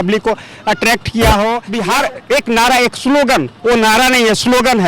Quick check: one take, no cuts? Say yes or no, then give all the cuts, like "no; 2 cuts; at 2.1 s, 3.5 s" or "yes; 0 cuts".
no; 1 cut; at 1.7 s